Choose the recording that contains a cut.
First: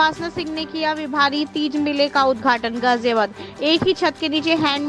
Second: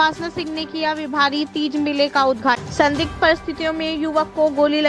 second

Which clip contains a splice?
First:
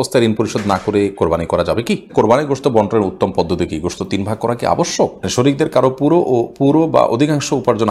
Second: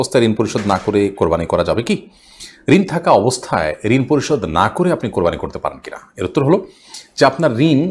first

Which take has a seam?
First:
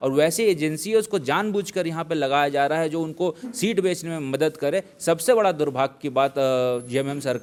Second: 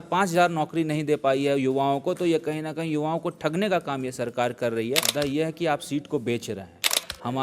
second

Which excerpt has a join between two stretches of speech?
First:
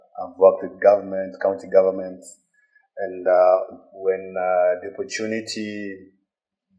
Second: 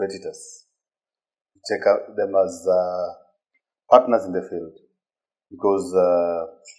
first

